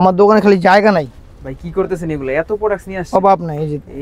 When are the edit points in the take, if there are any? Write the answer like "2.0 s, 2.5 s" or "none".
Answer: none